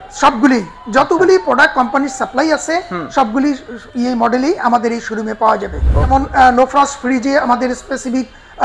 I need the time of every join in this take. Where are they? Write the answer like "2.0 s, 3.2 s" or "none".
6.1 s